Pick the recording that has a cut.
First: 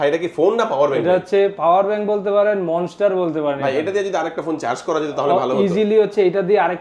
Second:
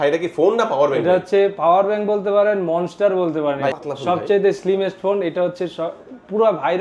second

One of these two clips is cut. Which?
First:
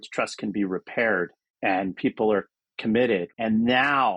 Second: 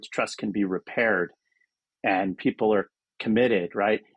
first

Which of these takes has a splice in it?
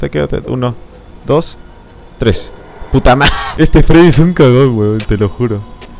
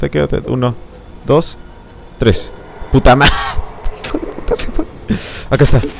first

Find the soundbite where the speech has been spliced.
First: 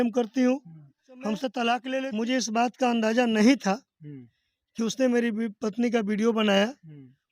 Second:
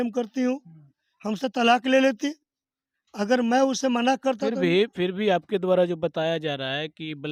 first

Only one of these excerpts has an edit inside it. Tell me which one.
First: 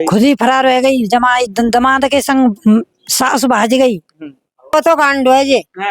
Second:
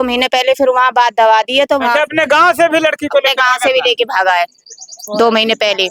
first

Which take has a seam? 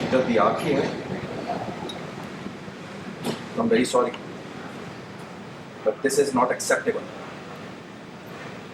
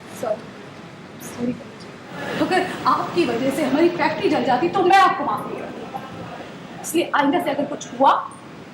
second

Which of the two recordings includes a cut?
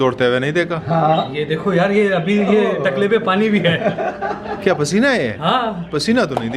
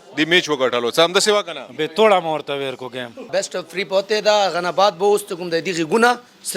second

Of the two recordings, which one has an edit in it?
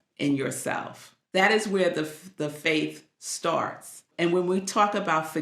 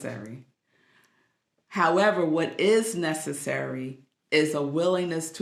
first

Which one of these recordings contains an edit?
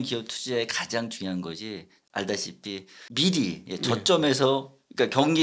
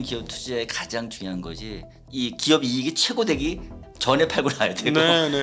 second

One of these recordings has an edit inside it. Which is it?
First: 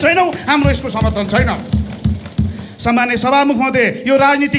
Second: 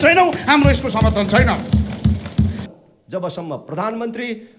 second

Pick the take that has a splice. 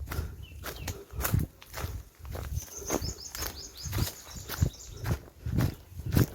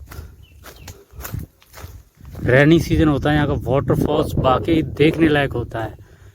second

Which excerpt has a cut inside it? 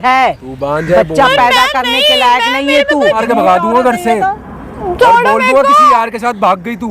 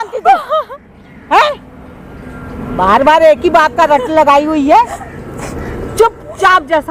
first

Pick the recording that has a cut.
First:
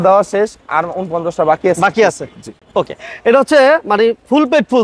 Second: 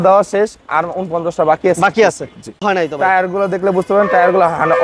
second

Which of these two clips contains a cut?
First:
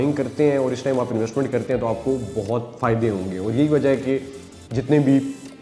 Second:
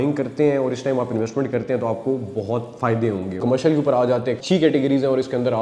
second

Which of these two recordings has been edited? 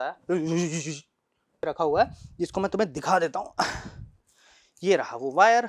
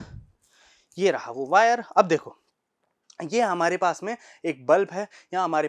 first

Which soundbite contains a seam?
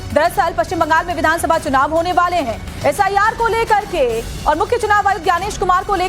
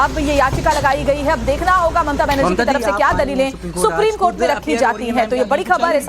second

